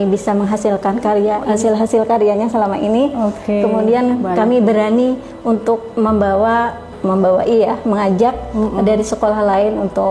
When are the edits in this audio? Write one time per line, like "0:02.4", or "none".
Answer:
0:01.4
0:06.8